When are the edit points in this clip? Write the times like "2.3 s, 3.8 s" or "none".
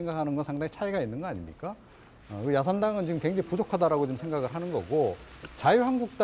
4.0 s